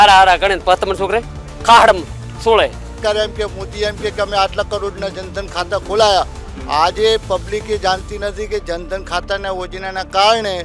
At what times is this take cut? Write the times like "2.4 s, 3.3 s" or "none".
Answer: 3.0 s